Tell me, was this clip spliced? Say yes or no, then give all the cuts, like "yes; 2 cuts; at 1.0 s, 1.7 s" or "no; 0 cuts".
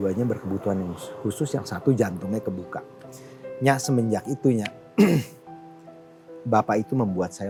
no; 0 cuts